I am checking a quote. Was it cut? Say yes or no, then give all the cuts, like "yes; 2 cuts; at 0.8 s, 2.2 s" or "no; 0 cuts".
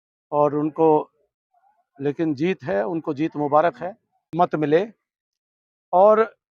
yes; 1 cut; at 4.2 s